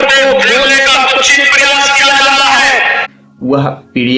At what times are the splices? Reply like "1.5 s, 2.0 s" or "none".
3.1 s